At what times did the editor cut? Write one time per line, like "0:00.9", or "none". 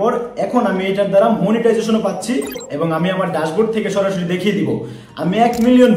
0:02.6